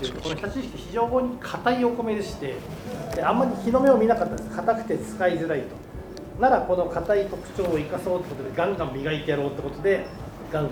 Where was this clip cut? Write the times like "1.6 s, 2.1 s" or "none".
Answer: none

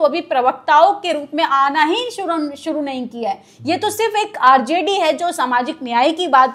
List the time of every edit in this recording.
none

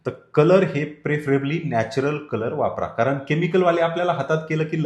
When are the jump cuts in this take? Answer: none

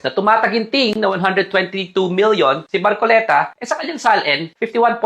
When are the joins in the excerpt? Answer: 2.6 s

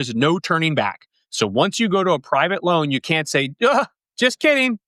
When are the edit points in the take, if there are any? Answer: none

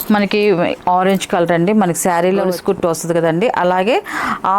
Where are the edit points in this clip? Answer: 2.5 s

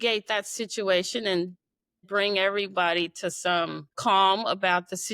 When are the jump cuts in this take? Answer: 4.0 s

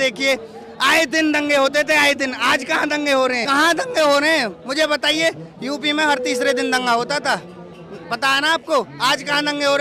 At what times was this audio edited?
none

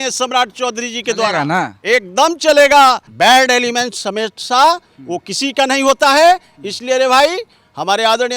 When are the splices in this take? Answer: 3.1 s

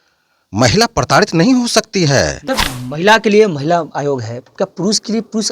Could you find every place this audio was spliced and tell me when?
2.4 s

